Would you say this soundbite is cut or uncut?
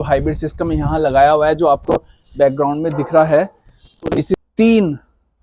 cut